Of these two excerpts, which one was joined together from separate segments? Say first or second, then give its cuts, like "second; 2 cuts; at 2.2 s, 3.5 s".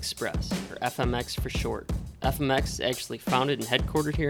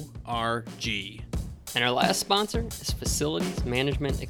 second; 1 cut; at 1.2 s